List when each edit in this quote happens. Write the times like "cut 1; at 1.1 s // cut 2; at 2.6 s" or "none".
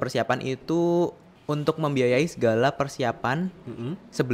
cut 1; at 1.3 s

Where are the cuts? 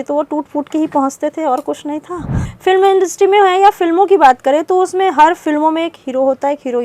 cut 1; at 2.4 s

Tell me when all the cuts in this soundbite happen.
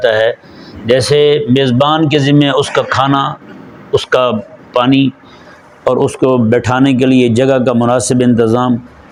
none

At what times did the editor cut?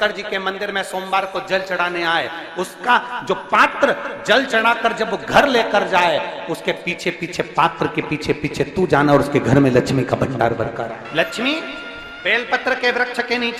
cut 1; at 11.0 s

